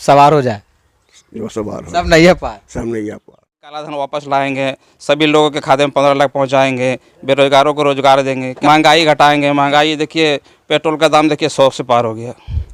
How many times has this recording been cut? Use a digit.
2